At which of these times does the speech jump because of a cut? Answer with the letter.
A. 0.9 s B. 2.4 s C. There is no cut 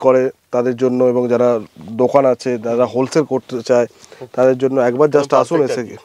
C